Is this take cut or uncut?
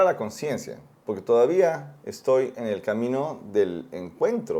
uncut